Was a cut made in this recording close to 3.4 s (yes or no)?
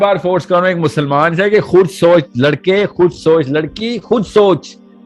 no